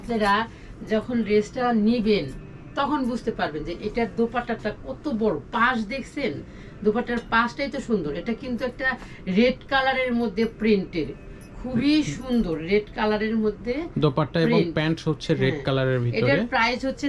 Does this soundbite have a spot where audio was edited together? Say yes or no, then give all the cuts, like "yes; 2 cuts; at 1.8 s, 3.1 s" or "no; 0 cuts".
no; 0 cuts